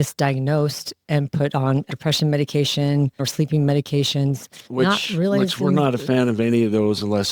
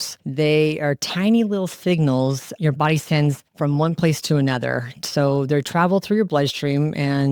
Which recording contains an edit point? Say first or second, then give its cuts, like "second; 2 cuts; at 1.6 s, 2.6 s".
first; 2 cuts; at 1.9 s, 3.3 s